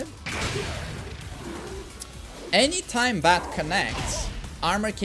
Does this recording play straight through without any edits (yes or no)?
yes